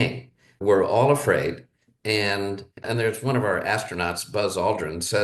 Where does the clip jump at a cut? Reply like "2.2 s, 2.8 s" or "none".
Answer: 2.8 s